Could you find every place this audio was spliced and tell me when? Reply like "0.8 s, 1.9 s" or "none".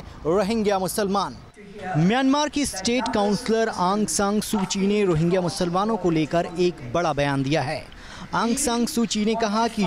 none

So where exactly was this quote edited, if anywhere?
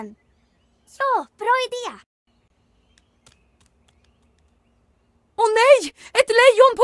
4.6 s

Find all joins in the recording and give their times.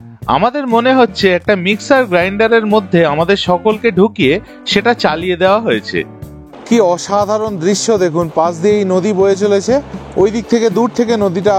6.5 s

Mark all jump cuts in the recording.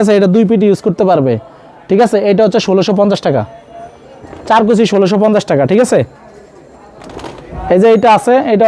none

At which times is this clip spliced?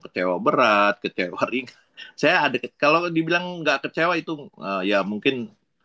none

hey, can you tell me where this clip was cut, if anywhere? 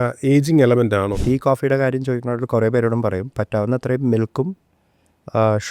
1.2 s

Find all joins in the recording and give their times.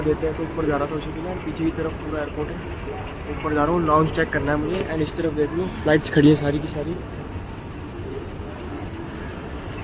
none

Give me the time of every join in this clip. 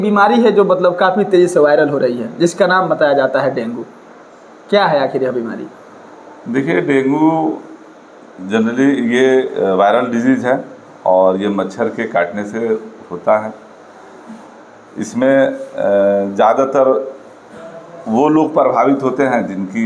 none

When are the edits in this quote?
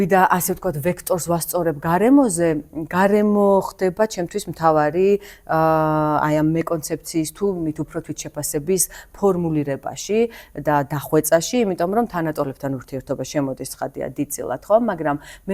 none

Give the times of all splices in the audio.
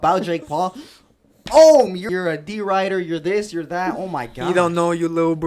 2.1 s

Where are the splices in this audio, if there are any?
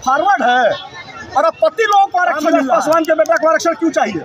2.5 s

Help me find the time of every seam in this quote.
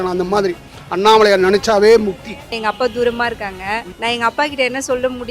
2.5 s, 3.9 s

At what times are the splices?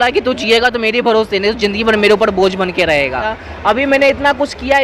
3.4 s

